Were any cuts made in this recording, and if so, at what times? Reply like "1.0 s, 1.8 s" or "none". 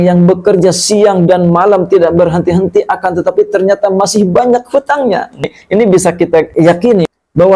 5.6 s, 6.5 s